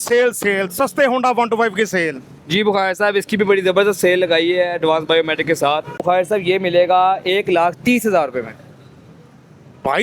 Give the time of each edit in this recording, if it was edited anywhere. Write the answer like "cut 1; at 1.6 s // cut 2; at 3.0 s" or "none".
cut 1; at 6.0 s